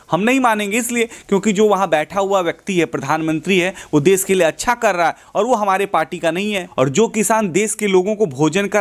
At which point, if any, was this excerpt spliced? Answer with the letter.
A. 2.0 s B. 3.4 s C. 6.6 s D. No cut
C